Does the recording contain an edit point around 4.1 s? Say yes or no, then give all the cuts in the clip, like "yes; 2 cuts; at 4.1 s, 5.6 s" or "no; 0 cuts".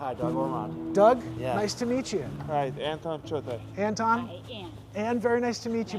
no; 1 cut; at 2.3 s